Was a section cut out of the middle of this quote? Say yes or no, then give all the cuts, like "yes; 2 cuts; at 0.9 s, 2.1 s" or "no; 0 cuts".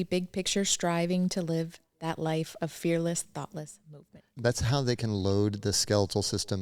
yes; 1 cut; at 4.4 s